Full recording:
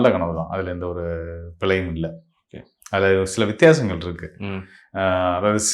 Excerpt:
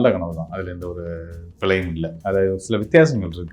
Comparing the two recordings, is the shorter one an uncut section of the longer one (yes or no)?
no